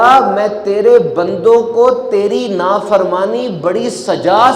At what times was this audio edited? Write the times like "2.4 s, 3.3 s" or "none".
none